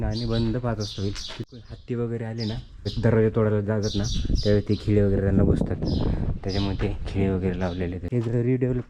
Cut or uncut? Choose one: cut